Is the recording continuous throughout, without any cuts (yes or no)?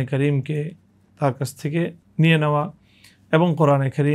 no